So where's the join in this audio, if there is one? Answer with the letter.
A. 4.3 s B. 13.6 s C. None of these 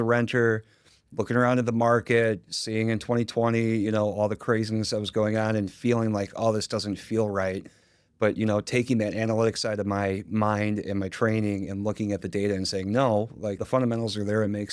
B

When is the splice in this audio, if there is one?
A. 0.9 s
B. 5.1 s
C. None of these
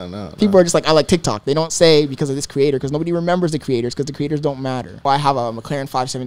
B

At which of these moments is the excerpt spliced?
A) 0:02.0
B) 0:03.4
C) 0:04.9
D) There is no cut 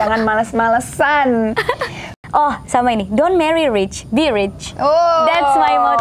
A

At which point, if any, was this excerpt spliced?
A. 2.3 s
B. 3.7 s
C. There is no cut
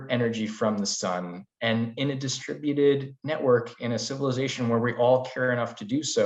C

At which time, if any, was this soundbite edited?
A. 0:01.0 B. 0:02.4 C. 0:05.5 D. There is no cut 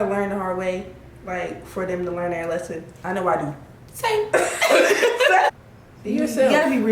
C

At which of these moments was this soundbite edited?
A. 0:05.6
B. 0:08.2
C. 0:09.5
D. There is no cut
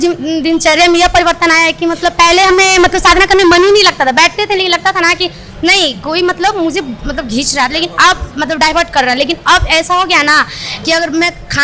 D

